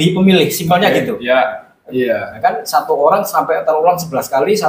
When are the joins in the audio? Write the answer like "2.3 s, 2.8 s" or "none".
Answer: 1.8 s